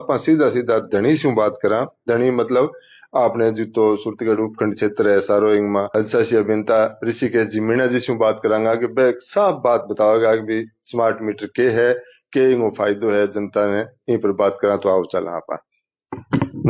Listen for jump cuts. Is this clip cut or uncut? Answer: uncut